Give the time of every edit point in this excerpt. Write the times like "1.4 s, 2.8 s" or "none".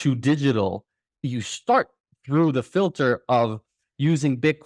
1.1 s